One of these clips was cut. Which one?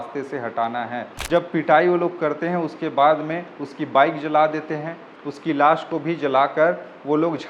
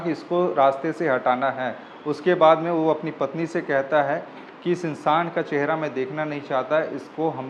first; 1 cut; at 1.1 s

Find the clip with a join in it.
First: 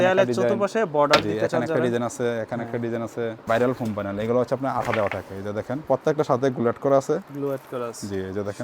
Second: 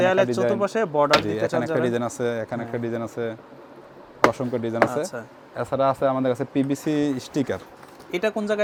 first; 2 cuts; at 3.4 s, 5.8 s

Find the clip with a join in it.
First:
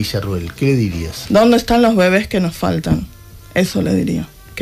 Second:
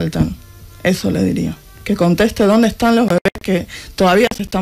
first; 1 cut; at 1.1 s

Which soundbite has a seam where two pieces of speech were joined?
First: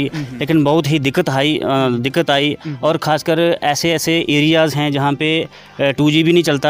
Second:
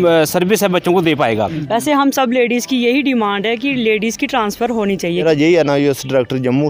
second; 2 cuts; at 1.6 s, 5.2 s

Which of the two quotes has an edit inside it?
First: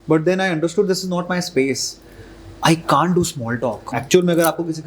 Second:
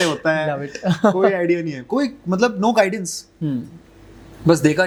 first; 1 cut; at 4.0 s

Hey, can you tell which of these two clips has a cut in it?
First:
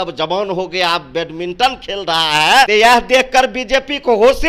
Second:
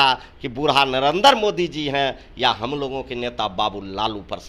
first; 1 cut; at 2.3 s

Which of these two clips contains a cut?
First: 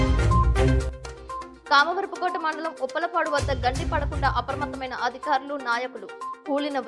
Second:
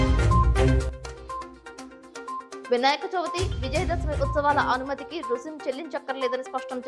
first; 1 cut; at 1.5 s

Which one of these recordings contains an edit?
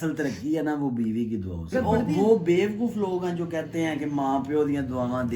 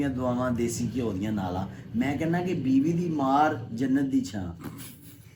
first; 1 cut; at 1.7 s

